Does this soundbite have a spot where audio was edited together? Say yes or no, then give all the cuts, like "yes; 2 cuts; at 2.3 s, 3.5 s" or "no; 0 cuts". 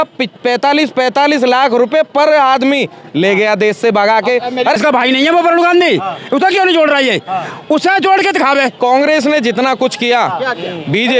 yes; 2 cuts; at 4.8 s, 8.7 s